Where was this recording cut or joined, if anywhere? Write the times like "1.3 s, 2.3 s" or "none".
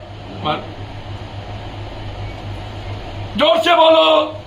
none